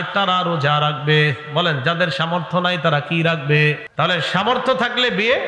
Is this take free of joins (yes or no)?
no